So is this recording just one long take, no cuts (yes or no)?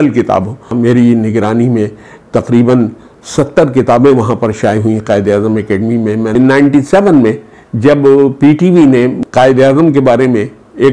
no